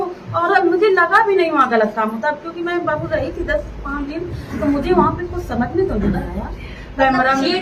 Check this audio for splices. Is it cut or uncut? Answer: uncut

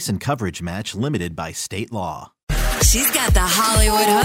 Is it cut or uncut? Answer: cut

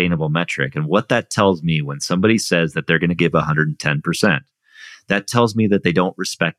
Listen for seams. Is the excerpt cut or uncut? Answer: uncut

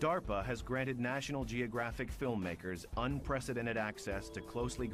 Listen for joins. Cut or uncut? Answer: uncut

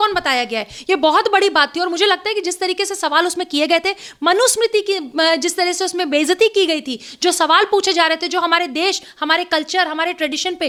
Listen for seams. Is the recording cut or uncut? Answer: uncut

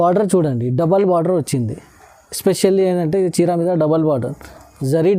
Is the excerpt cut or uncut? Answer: uncut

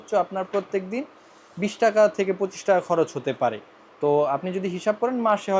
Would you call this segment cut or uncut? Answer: uncut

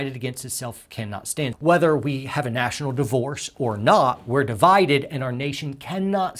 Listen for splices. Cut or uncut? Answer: cut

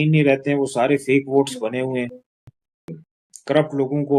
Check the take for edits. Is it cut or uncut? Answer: cut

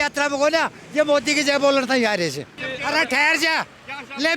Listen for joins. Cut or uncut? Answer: cut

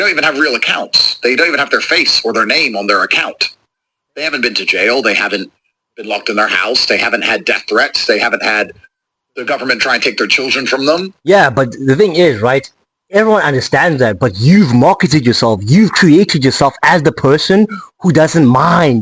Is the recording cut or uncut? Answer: uncut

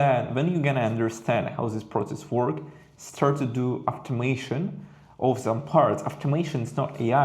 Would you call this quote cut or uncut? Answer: uncut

